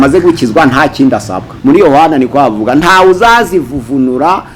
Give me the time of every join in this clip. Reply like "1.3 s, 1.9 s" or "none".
1.5 s